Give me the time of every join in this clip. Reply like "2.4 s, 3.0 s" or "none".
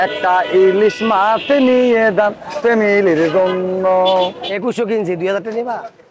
4.4 s